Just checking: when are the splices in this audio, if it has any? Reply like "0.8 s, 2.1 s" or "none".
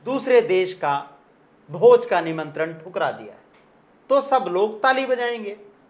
none